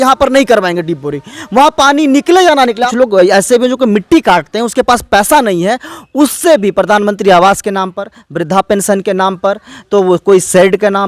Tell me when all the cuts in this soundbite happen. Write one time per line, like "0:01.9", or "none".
0:02.8